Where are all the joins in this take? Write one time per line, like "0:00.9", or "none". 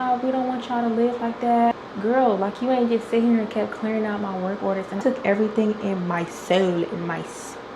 0:01.7
0:05.0